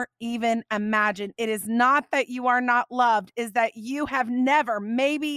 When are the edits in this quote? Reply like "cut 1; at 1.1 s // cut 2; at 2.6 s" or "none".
none